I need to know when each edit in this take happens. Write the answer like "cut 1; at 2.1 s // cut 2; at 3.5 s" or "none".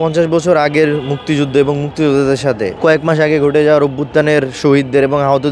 cut 1; at 2.7 s

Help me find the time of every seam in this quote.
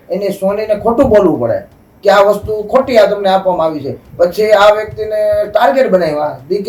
none

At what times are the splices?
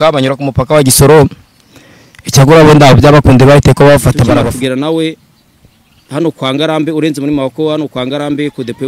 cut 1; at 4.3 s

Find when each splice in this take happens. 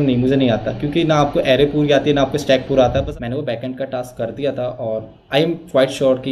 cut 1; at 3.0 s

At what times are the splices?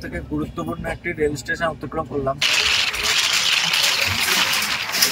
cut 1; at 2.4 s

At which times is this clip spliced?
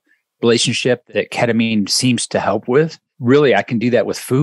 cut 1; at 1.0 s // cut 2; at 3.1 s

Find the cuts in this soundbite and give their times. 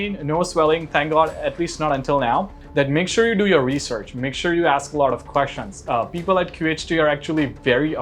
cut 1; at 2.6 s

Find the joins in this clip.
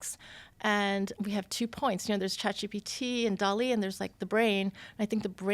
cut 1; at 1.1 s

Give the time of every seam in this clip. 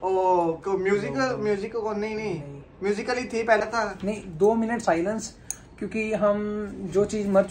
cut 1; at 3.7 s

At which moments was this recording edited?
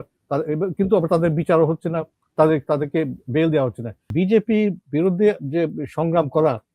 cut 1; at 4.1 s

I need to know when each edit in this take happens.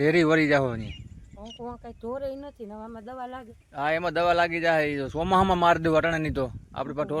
none

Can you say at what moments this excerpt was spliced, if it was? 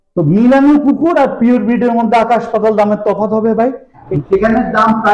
cut 1; at 4.1 s

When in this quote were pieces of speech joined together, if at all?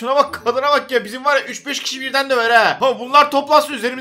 cut 1; at 2.8 s

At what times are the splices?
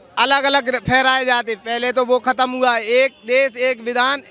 none

